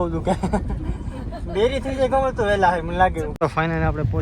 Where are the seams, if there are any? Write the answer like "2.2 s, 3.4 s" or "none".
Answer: 3.3 s